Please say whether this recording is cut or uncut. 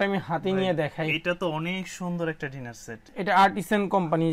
cut